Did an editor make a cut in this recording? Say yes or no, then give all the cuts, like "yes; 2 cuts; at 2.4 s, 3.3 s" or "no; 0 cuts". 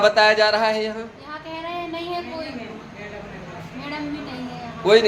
no; 0 cuts